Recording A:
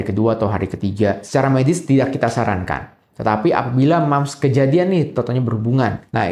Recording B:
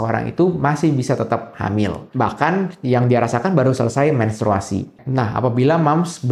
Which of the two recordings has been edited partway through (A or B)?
B